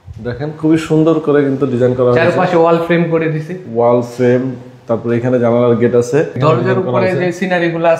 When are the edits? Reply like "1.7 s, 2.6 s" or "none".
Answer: 6.4 s